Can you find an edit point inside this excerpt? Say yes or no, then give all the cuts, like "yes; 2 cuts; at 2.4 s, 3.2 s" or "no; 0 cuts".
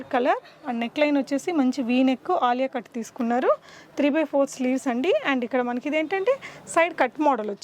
no; 0 cuts